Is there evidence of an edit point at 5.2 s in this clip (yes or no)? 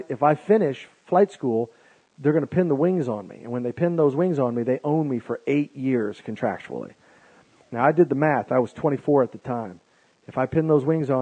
yes